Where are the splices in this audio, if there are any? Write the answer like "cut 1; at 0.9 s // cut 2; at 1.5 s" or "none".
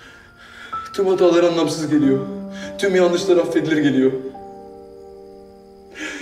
none